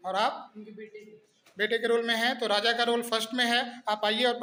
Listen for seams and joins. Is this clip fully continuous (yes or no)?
yes